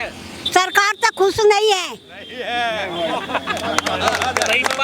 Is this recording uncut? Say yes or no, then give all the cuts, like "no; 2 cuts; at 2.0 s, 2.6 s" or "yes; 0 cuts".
yes; 0 cuts